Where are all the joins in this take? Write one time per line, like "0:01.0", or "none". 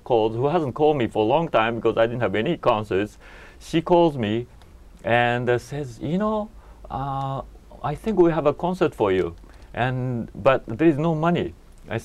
none